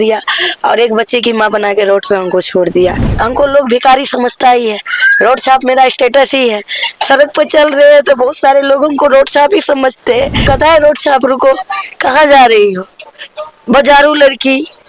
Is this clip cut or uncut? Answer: cut